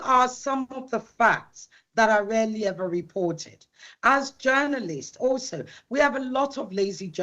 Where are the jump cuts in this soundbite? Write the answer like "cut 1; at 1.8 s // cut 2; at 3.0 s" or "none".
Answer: none

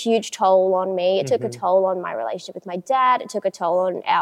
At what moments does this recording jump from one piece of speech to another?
none

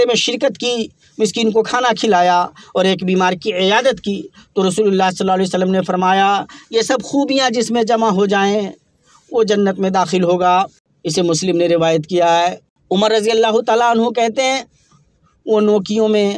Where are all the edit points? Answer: none

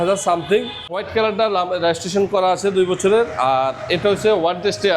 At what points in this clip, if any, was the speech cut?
cut 1; at 1.0 s

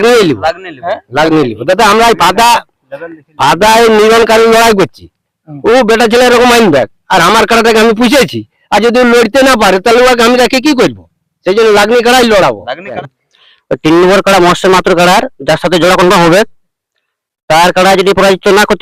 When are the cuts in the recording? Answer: cut 1; at 13.0 s

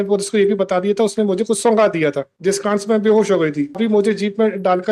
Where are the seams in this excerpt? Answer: cut 1; at 3.8 s

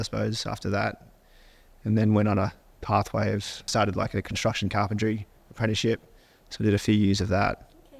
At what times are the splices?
cut 1; at 3.7 s

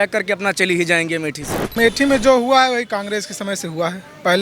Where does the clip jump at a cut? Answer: cut 1; at 1.8 s

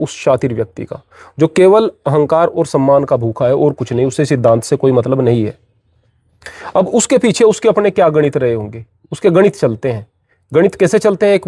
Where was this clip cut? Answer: none

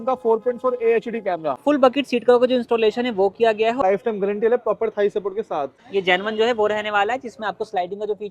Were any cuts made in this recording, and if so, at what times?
cut 1; at 1.6 s // cut 2; at 3.8 s // cut 3; at 5.8 s

